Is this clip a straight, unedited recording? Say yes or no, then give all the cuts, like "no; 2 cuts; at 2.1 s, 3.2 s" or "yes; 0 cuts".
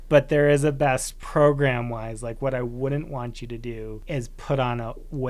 no; 2 cuts; at 1.2 s, 4.0 s